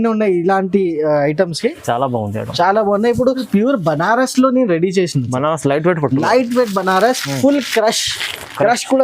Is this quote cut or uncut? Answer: cut